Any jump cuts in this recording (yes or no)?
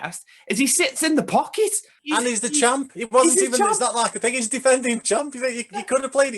yes